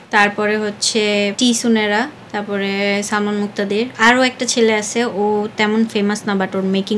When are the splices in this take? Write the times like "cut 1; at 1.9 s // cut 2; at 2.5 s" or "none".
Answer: cut 1; at 1.3 s // cut 2; at 2.2 s // cut 3; at 3.9 s